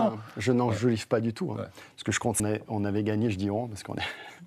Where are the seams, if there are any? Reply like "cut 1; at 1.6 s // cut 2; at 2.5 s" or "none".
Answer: cut 1; at 2.4 s